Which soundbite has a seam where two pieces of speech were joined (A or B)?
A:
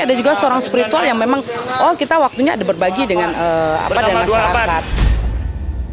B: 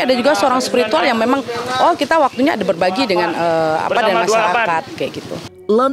A